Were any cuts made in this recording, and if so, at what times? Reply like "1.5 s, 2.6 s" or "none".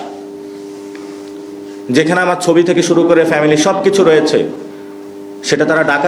none

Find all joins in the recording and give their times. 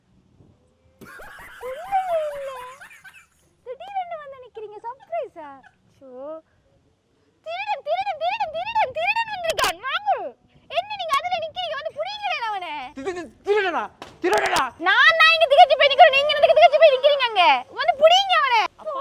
none

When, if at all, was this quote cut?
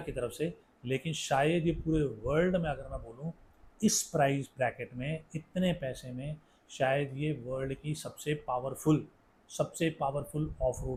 none

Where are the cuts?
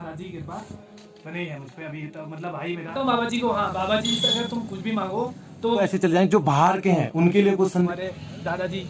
2.9 s, 5.8 s, 7.9 s

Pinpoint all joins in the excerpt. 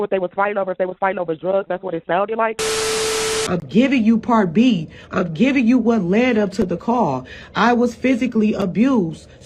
3.0 s

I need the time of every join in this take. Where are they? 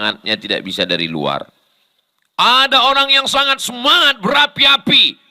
none

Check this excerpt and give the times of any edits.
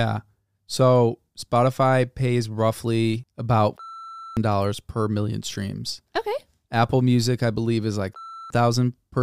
3.3 s

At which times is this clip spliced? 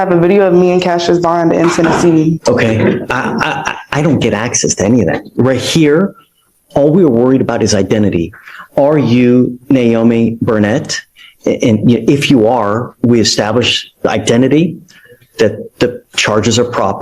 2.4 s

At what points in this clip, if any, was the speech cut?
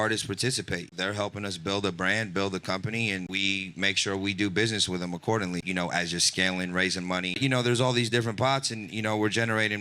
1.0 s, 3.3 s, 5.6 s, 7.4 s

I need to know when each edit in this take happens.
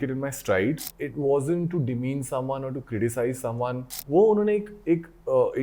0.9 s, 4.0 s

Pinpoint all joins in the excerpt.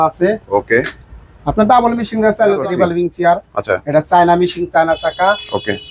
2.6 s

